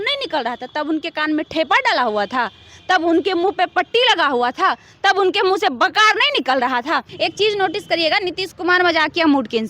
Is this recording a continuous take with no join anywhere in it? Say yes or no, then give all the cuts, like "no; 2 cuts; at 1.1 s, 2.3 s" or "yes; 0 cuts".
no; 1 cut; at 7.1 s